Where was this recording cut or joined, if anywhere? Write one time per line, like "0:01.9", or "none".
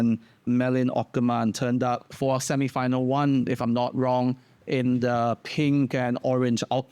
none